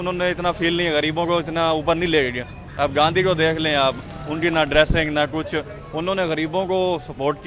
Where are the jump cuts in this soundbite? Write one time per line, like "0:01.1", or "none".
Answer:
none